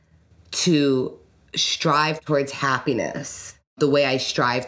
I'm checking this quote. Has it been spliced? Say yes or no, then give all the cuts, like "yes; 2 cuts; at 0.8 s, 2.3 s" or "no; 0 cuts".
yes; 1 cut; at 3.8 s